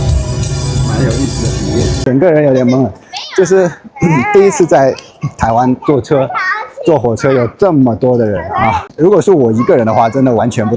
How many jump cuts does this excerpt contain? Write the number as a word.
one